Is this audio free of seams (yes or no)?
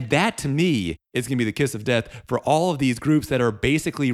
no